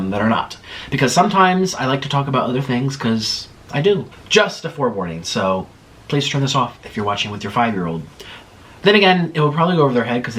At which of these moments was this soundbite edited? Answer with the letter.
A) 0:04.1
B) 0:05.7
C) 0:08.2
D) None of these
A